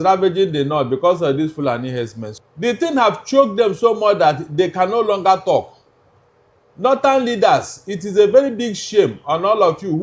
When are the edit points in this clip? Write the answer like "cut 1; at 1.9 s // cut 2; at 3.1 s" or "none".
cut 1; at 2.2 s